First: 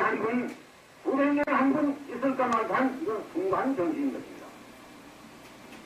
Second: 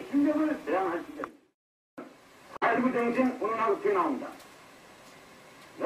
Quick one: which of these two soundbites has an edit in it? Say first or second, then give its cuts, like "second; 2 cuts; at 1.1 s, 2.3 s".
second; 1 cut; at 2.0 s